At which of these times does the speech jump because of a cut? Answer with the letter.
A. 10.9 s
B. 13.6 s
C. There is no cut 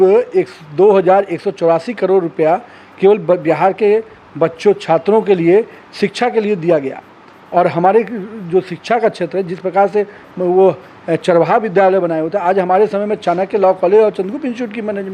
C